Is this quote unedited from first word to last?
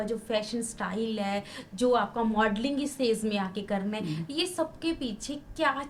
yes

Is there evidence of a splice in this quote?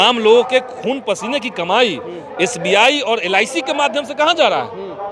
no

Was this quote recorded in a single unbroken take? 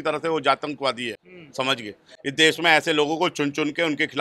yes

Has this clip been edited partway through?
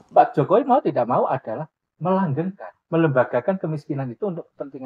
no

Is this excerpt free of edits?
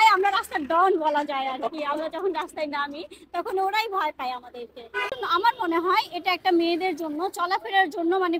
no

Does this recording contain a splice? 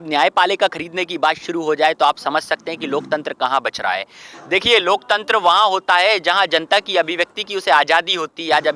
no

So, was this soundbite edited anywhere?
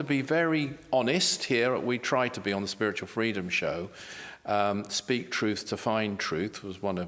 no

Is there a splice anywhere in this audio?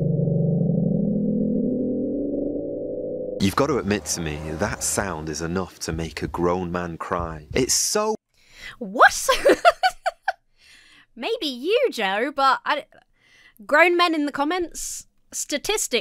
no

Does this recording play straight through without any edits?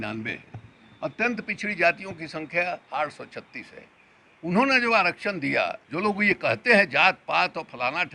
no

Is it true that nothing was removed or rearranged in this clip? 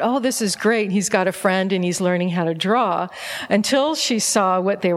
yes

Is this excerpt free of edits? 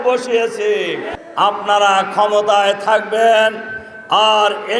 no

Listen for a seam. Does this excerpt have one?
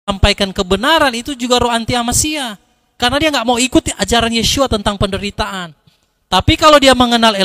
no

